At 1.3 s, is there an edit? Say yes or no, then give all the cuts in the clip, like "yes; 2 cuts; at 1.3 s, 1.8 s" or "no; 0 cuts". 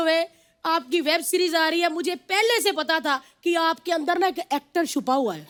no; 0 cuts